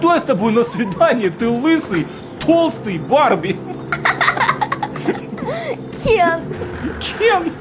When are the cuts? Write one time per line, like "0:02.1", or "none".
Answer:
none